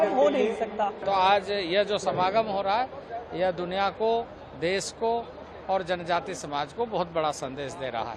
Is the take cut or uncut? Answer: cut